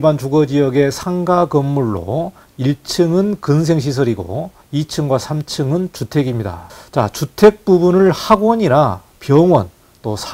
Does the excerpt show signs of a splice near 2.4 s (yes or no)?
no